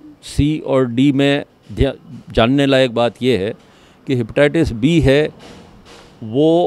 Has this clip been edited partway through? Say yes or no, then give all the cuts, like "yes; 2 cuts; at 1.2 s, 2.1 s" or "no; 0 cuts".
no; 0 cuts